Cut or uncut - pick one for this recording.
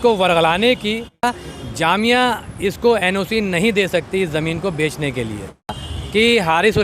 cut